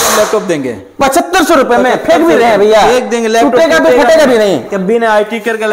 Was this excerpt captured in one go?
yes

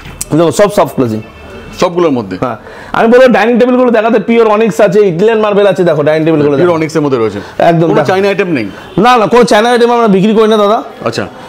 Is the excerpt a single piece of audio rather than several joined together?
yes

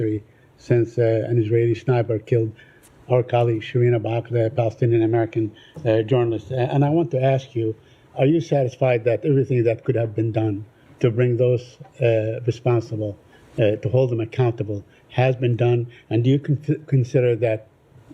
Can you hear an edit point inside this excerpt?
no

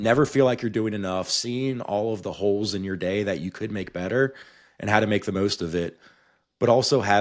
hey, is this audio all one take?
yes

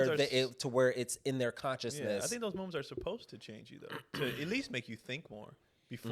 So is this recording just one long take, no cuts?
yes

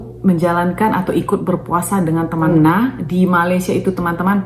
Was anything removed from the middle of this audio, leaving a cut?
yes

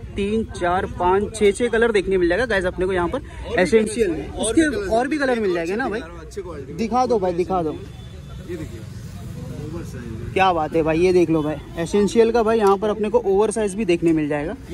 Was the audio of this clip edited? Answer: no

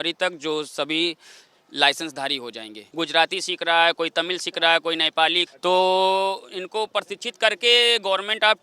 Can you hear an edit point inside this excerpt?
yes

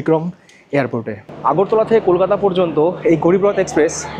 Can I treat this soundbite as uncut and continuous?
no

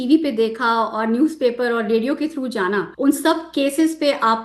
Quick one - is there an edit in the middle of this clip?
yes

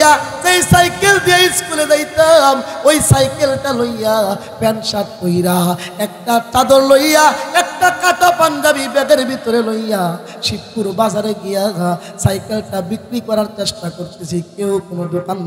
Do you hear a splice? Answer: no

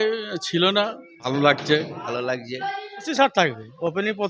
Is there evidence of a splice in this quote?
yes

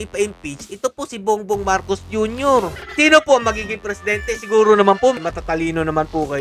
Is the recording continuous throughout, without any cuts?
no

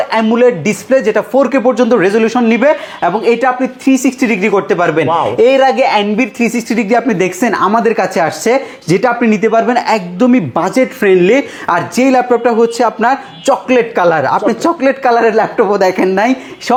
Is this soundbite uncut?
yes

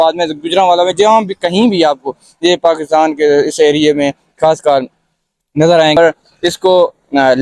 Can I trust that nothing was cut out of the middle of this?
no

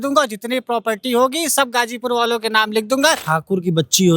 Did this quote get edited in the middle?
yes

